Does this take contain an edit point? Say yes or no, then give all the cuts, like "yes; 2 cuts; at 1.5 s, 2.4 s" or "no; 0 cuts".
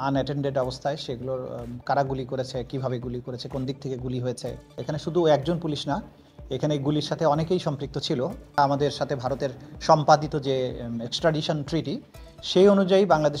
yes; 2 cuts; at 4.7 s, 8.4 s